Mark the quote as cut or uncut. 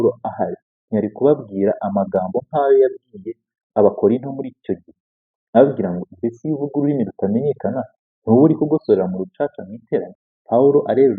cut